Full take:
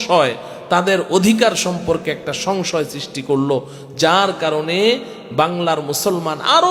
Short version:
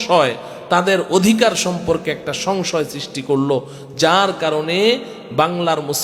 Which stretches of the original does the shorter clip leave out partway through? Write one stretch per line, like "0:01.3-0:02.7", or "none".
none